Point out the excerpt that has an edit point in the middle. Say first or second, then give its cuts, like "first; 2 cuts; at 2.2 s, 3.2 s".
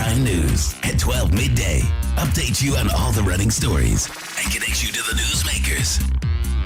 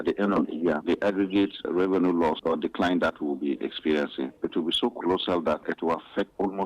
second; 4 cuts; at 0.8 s, 1.6 s, 2.4 s, 4.3 s